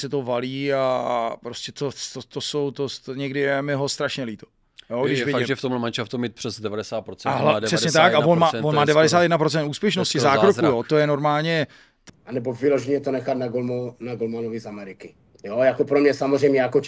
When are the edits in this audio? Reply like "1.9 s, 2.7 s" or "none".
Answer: 12.1 s